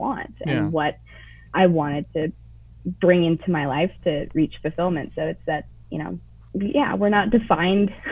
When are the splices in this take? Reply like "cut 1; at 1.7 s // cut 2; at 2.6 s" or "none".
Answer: cut 1; at 6.3 s